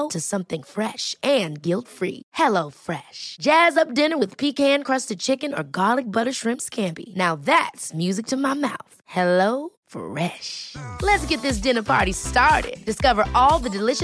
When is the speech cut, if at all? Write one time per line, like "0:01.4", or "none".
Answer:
none